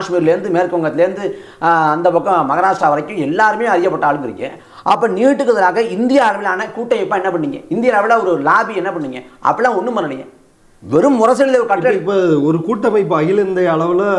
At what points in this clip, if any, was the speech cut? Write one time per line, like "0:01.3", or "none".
none